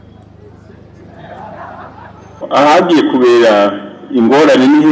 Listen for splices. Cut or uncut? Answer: cut